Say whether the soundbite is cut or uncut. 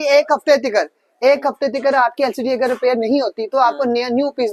uncut